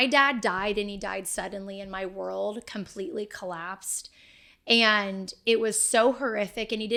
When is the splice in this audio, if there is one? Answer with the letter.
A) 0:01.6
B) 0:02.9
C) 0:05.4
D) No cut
D